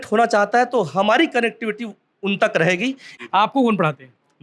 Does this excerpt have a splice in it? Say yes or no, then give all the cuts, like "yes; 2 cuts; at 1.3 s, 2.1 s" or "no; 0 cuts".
yes; 1 cut; at 3.1 s